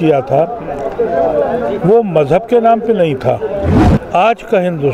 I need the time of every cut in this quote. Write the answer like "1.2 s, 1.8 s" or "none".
3.8 s